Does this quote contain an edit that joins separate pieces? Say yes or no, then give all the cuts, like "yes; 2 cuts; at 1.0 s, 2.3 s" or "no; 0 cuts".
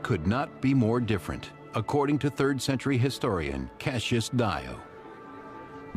yes; 1 cut; at 3.2 s